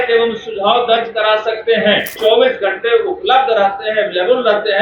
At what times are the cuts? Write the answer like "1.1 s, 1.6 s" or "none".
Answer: 2.2 s